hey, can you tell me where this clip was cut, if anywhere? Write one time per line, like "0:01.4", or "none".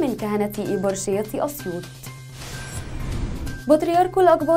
0:01.8
0:03.5